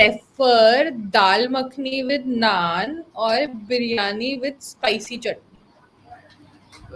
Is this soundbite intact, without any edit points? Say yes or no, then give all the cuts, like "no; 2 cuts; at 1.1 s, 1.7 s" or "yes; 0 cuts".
yes; 0 cuts